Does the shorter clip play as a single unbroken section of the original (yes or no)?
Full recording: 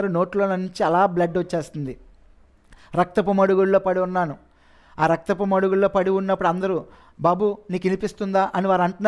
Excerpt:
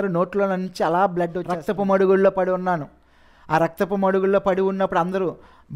no